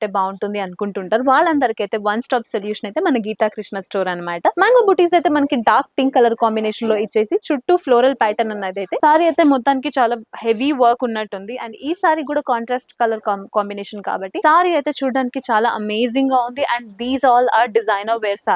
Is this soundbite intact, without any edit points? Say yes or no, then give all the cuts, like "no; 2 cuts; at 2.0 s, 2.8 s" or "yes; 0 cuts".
no; 3 cuts; at 4.5 s, 9.0 s, 14.4 s